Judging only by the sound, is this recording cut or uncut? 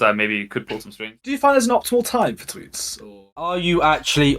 cut